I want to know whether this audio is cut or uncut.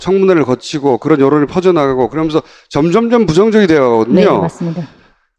uncut